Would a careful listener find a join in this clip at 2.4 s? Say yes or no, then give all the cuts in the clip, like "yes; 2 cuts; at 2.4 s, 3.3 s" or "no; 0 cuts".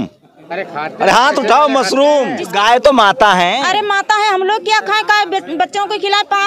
yes; 1 cut; at 2.4 s